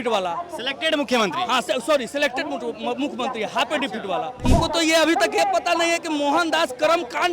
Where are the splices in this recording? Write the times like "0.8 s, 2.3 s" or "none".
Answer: 4.4 s

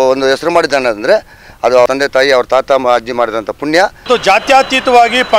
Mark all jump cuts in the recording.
1.9 s, 4.1 s

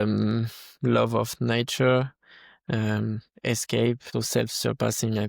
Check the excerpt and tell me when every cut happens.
4.1 s

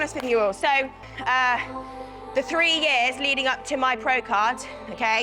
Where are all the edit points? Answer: 1.1 s

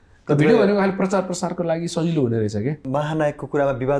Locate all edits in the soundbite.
2.8 s

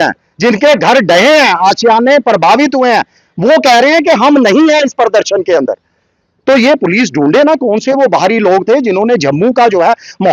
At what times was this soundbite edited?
none

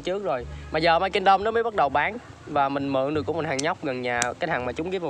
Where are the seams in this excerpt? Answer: none

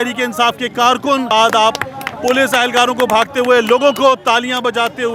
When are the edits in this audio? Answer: 1.3 s

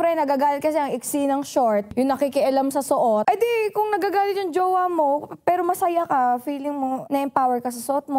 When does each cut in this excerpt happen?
1.9 s, 3.2 s, 7.0 s

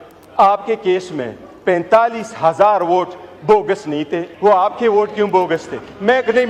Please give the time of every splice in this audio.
4.2 s

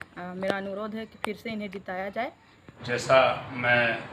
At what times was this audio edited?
2.8 s

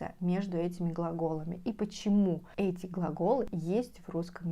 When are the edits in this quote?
3.5 s

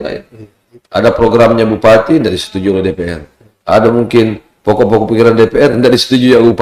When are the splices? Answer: none

